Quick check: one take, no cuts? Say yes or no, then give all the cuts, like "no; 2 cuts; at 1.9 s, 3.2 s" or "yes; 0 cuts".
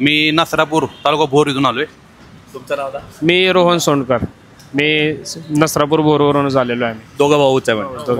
yes; 0 cuts